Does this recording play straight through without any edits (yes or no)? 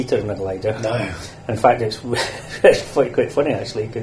yes